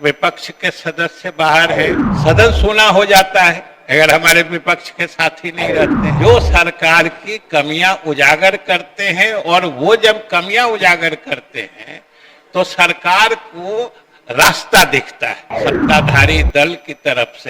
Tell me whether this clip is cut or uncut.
cut